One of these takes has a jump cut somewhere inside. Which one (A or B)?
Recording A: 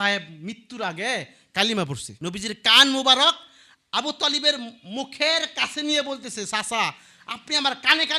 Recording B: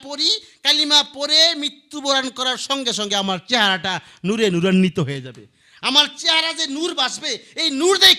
A